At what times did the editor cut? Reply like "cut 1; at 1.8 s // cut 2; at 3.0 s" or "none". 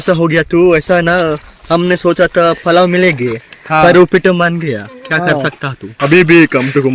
cut 1; at 5.9 s